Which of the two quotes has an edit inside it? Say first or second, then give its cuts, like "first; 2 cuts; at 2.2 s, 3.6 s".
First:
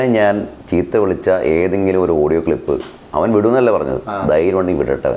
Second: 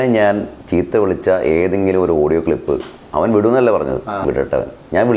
second; 1 cut; at 4.2 s